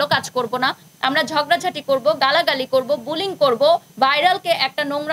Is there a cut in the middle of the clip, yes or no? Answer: yes